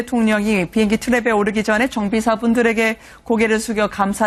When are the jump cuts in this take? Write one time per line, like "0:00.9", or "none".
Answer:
none